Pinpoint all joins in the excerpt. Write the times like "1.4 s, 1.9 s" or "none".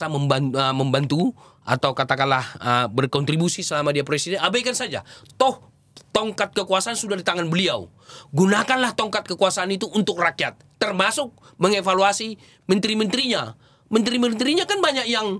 none